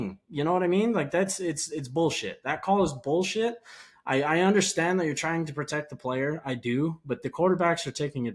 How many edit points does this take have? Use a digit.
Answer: 0